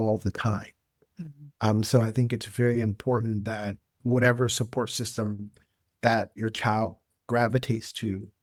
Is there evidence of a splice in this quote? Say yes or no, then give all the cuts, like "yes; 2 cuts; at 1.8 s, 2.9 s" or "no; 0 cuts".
no; 0 cuts